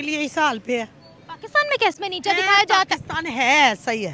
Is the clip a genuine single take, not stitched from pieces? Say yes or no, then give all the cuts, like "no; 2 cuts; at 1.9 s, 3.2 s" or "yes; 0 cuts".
no; 1 cut; at 1.9 s